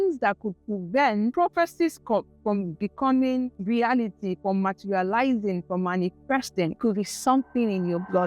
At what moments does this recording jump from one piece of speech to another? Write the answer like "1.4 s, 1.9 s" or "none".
1.3 s, 3.6 s, 6.8 s